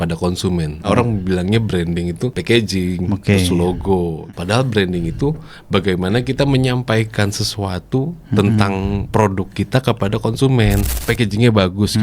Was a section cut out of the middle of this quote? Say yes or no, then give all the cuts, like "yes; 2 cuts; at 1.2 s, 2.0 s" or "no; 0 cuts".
yes; 4 cuts; at 0.9 s, 2.4 s, 4.2 s, 10.9 s